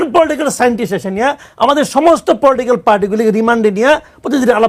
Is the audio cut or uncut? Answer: uncut